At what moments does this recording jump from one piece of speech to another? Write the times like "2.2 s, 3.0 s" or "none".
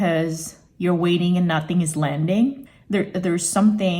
2.7 s